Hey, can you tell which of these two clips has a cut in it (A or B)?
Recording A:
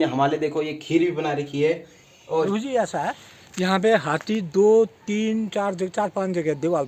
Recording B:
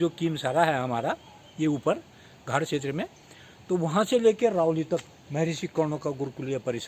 A